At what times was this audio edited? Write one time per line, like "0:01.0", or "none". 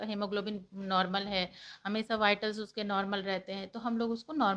none